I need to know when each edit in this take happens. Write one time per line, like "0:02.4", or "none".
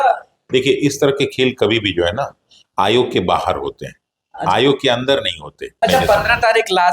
0:05.8